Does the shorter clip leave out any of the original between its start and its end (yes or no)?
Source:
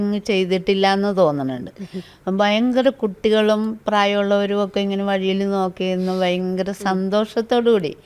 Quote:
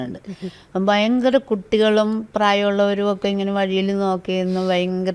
no